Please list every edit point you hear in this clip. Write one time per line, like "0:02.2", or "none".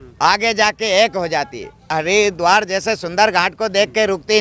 0:01.9